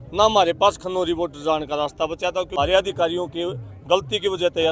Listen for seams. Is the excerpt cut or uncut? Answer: cut